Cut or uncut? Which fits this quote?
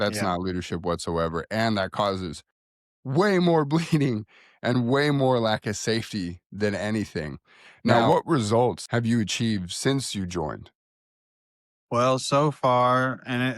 cut